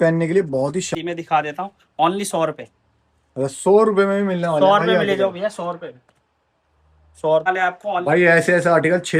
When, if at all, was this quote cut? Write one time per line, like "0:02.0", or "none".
0:00.9
0:07.5